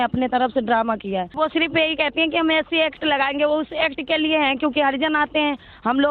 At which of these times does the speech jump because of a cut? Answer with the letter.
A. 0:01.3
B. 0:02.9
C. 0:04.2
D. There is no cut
A